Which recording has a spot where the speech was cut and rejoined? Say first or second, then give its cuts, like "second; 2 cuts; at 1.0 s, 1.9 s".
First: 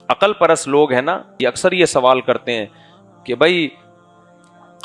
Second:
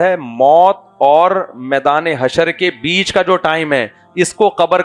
first; 1 cut; at 1.3 s